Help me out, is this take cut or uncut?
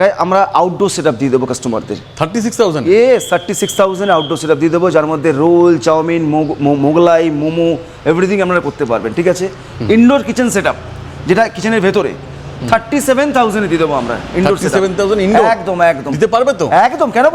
uncut